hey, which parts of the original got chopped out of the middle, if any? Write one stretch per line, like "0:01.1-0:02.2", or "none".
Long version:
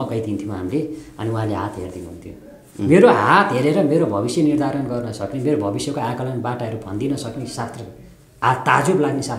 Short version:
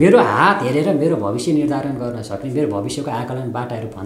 none